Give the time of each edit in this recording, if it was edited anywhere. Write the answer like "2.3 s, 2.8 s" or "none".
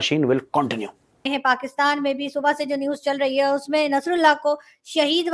1.3 s

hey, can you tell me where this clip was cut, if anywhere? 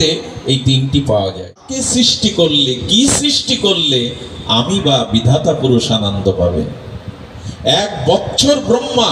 1.7 s

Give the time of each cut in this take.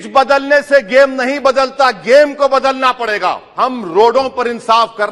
3.5 s

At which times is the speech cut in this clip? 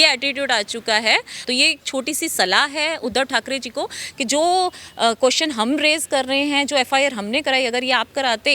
1.4 s

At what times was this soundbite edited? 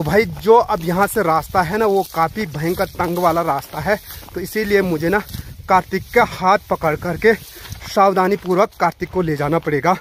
none

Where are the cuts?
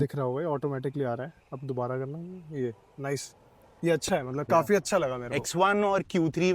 5.2 s

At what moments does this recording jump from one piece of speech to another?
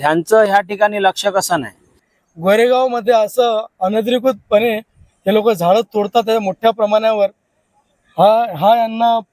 2.1 s

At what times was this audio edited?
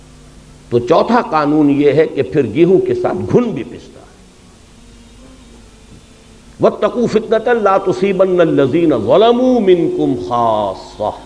none

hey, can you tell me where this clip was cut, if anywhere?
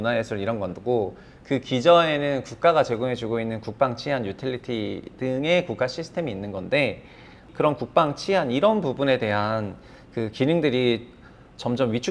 7.4 s

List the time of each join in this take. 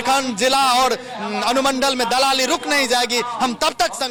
none

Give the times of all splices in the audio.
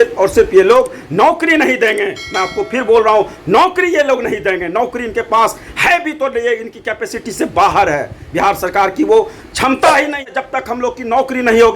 10.3 s

